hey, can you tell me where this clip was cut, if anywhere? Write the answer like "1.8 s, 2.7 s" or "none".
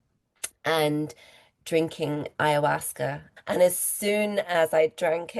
3.3 s